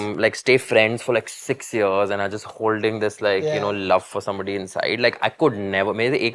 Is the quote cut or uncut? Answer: uncut